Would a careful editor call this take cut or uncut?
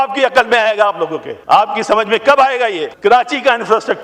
cut